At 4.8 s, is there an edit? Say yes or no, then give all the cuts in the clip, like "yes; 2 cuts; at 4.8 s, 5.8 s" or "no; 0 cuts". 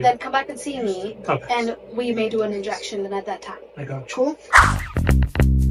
yes; 1 cut; at 4.8 s